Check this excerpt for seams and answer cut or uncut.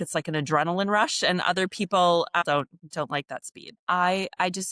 cut